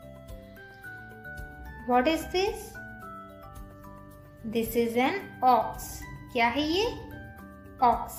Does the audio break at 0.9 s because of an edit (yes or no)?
no